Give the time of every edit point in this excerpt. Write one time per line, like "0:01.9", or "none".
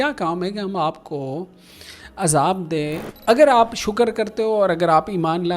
0:03.1

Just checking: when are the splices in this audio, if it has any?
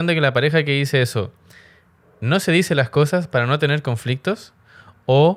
none

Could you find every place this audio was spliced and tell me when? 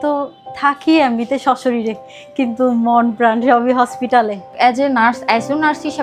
0:04.4

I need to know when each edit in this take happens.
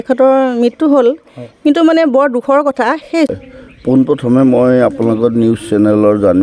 0:03.3

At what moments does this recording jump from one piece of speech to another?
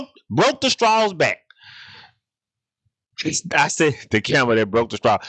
none

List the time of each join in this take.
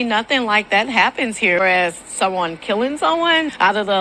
0:01.6

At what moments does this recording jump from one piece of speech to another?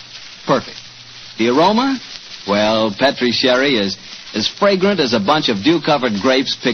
0:04.4

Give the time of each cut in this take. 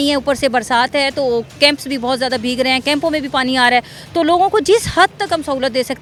none

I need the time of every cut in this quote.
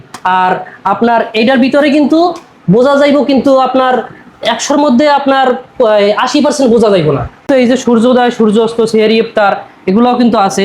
0:07.5

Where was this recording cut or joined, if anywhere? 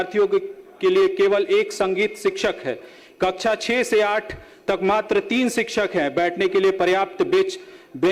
none

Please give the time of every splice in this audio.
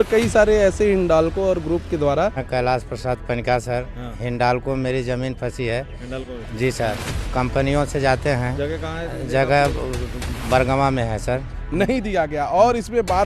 0:02.4
0:11.6

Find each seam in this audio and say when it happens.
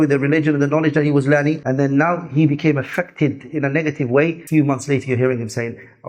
0:01.6
0:04.4

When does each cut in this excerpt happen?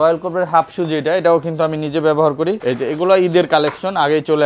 0:02.6

